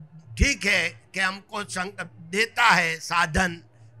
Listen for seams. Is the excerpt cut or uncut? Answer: uncut